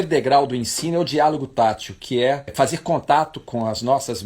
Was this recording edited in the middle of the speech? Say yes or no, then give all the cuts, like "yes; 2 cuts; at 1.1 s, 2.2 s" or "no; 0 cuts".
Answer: yes; 1 cut; at 2.5 s